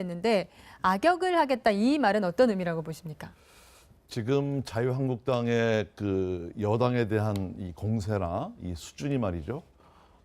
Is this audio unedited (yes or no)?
no